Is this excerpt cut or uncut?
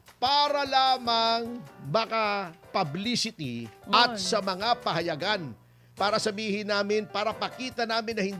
cut